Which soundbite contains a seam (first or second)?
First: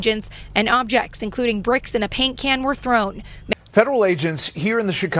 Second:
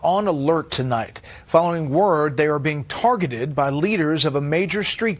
first